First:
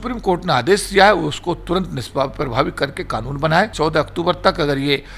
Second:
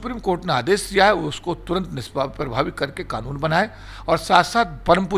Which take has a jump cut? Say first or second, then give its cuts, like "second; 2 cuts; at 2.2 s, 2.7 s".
first; 1 cut; at 3.7 s